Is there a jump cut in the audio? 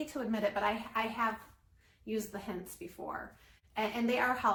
no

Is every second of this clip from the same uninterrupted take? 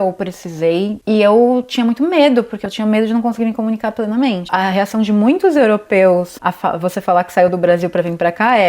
no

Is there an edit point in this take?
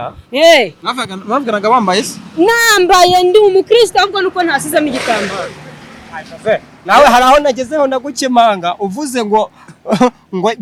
no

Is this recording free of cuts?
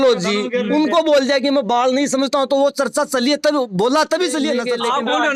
no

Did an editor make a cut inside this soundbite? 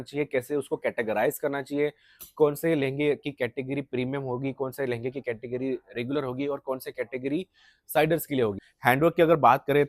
yes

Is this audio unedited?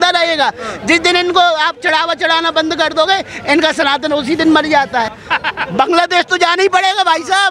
no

